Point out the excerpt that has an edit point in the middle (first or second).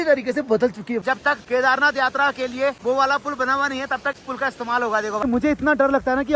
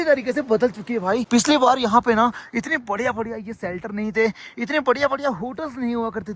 first